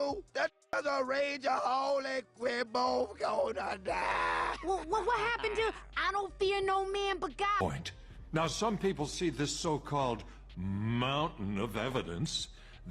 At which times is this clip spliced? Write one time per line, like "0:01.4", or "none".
0:07.6